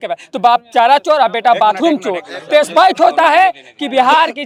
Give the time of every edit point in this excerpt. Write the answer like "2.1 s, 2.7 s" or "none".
none